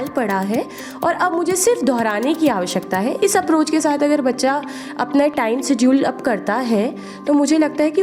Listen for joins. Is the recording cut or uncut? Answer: uncut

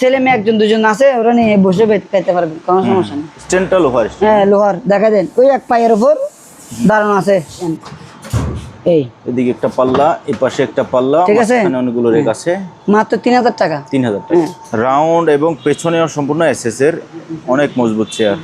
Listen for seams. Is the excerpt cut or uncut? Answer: cut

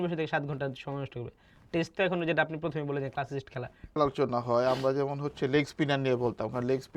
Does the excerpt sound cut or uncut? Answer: cut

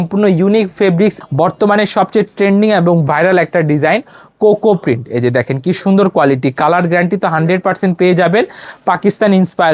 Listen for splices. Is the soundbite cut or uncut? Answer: cut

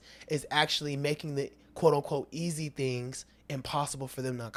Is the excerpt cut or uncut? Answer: uncut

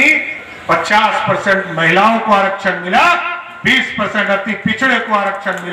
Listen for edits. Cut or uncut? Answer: uncut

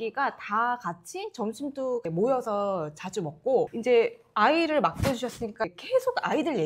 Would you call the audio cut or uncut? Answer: uncut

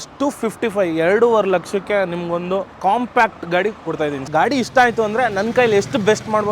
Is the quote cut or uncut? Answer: cut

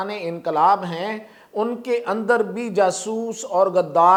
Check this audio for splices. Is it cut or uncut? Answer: uncut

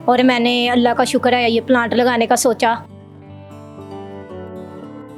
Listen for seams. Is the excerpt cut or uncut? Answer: uncut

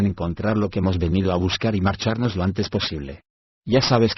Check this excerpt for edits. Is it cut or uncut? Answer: cut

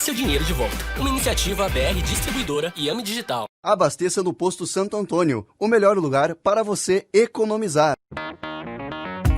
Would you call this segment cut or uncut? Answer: cut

